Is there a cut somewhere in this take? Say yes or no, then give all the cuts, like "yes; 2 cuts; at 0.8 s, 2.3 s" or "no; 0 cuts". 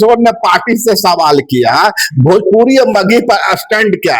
no; 0 cuts